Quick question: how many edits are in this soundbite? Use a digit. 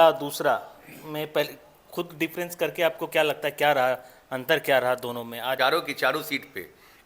1